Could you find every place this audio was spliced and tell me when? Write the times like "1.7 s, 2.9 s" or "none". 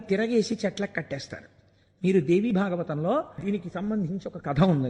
3.4 s